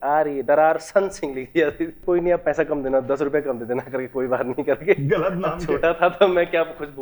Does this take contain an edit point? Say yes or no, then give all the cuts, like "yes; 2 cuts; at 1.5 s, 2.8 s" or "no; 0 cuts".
yes; 1 cut; at 2.0 s